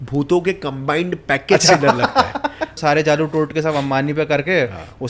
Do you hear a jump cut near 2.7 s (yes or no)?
yes